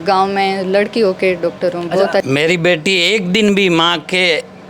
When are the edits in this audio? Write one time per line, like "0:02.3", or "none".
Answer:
0:02.2